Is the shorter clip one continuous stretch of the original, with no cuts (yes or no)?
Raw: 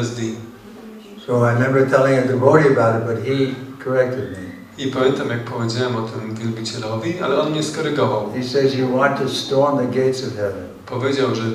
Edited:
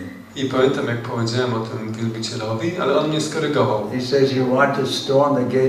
yes